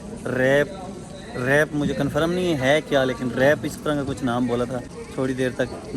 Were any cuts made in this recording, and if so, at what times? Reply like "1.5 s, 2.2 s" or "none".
4.9 s